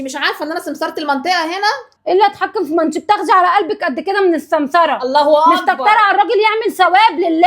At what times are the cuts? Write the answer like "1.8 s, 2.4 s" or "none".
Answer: 1.9 s